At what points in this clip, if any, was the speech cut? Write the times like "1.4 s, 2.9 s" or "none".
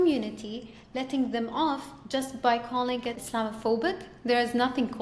3.2 s